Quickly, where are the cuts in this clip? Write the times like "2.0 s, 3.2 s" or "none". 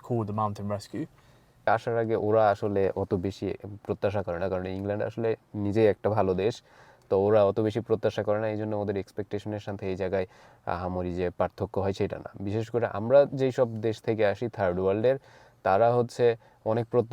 1.6 s